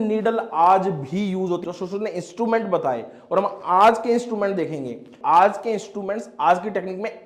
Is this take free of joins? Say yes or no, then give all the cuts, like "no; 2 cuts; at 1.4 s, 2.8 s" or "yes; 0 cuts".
no; 2 cuts; at 1.6 s, 5.1 s